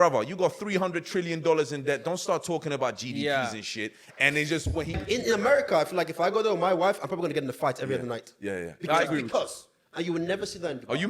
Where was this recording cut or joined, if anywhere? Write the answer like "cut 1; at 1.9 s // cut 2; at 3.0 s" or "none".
cut 1; at 5.0 s

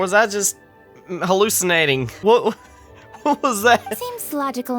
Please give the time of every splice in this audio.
cut 1; at 2.1 s

